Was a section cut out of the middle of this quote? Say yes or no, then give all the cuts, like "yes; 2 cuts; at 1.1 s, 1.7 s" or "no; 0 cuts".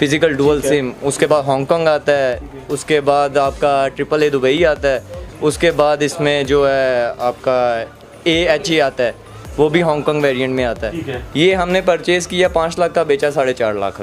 yes; 1 cut; at 11.0 s